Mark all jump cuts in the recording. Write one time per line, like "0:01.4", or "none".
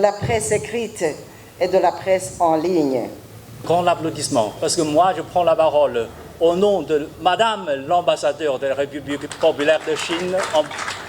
0:03.6